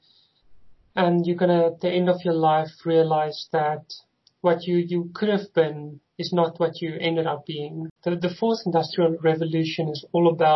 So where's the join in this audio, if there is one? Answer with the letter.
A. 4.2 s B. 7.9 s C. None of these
B